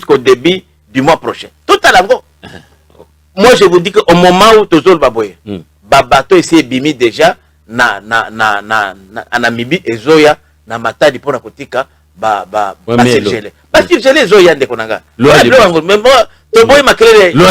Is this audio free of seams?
yes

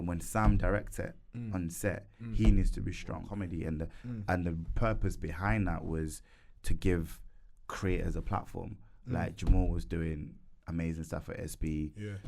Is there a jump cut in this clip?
yes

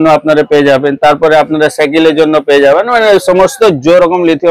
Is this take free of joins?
yes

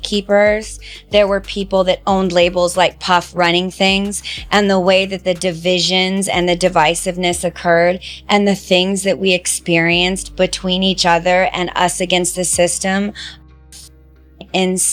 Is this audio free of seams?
yes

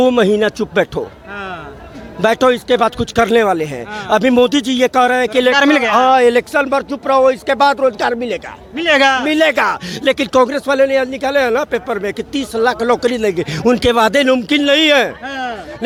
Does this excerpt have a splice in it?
no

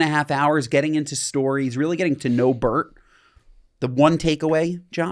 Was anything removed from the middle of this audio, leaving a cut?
no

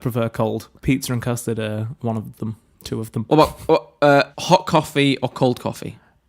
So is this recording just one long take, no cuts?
no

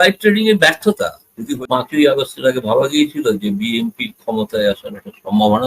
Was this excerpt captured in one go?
no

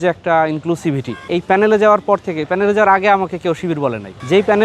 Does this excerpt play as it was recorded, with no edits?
no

